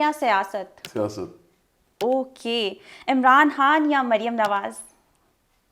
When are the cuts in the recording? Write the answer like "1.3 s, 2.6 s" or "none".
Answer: none